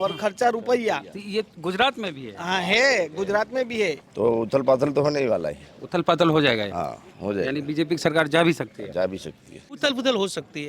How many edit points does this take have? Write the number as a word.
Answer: two